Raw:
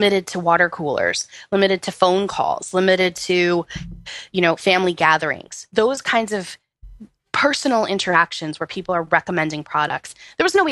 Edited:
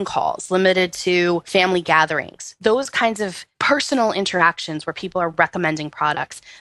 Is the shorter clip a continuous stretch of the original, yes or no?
no